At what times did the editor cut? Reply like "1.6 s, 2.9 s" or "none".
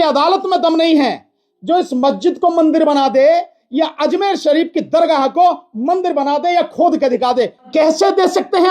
7.6 s

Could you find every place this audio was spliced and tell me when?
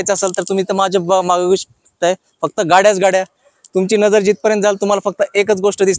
none

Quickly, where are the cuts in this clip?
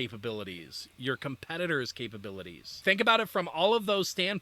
2.7 s

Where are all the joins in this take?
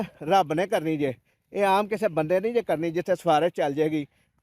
none

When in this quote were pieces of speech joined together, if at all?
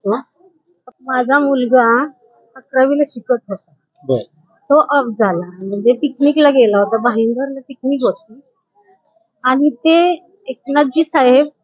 none

